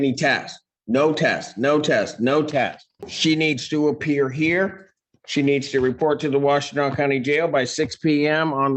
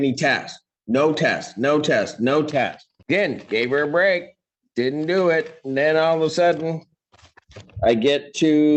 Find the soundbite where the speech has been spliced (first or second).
first